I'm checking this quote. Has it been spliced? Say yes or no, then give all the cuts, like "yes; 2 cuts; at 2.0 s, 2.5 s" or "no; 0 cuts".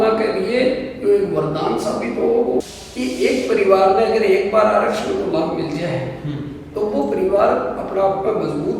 yes; 1 cut; at 2.7 s